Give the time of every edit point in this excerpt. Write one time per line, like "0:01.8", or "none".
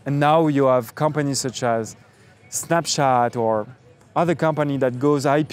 none